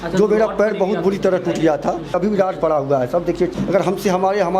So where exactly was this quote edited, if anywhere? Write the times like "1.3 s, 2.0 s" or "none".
2.2 s, 3.5 s